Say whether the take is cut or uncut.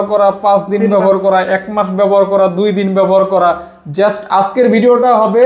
uncut